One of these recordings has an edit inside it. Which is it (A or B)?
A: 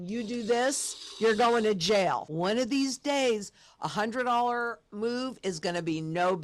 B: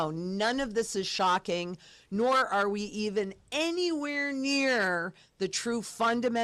A